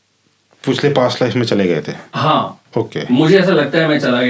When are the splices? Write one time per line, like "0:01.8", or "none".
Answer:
none